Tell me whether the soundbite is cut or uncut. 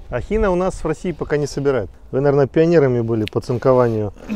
cut